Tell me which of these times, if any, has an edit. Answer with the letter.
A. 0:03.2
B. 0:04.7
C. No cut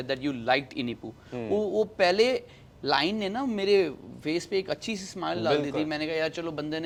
C